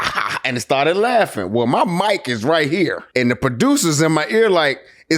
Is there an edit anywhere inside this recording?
yes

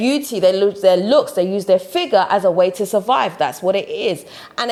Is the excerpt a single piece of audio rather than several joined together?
yes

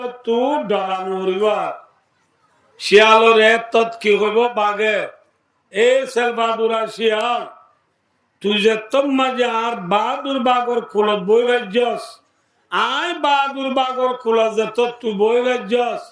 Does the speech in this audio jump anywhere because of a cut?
no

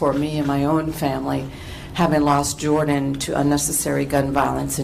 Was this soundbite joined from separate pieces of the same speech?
no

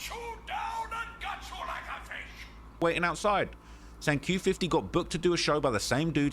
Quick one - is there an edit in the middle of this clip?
yes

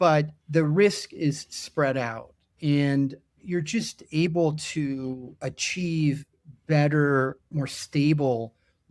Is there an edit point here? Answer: yes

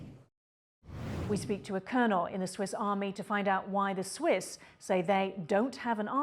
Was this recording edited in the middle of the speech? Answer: yes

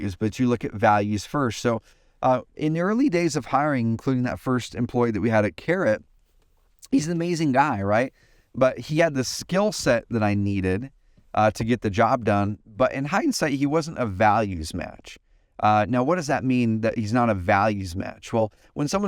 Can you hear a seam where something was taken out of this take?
no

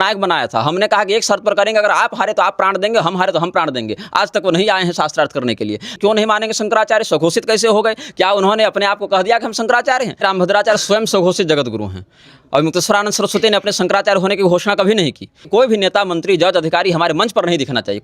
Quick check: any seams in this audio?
yes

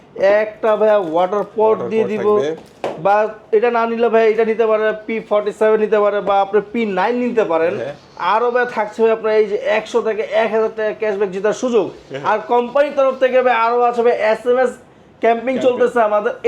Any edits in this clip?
no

